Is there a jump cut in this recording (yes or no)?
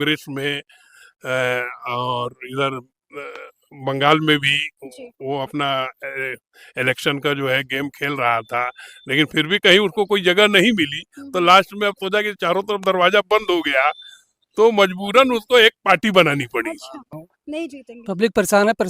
yes